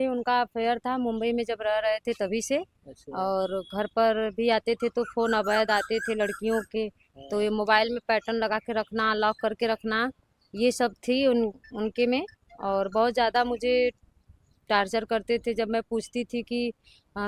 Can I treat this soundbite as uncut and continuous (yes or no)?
yes